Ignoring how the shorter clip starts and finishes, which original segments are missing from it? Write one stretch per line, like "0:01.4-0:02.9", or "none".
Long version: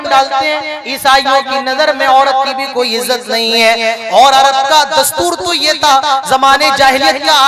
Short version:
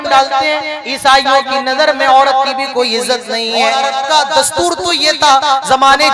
0:03.5-0:04.1